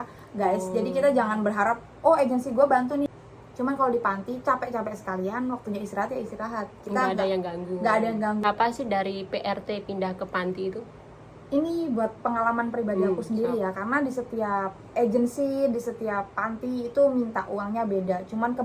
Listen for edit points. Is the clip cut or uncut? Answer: cut